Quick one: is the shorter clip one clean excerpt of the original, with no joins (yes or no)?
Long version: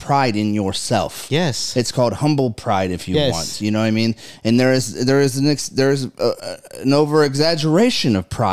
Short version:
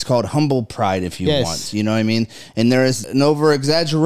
no